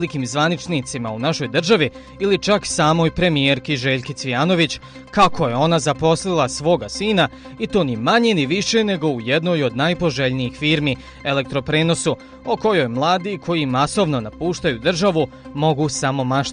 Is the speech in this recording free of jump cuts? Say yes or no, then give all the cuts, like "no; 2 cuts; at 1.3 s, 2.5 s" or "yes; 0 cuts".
no; 1 cut; at 10.4 s